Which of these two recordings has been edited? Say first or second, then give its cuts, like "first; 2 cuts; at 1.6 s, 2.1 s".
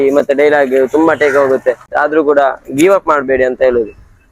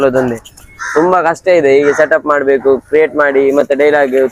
first; 1 cut; at 1.9 s